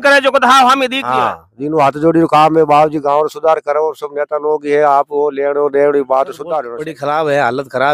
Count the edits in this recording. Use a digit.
1